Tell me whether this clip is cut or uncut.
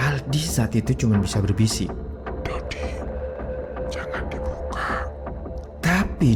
uncut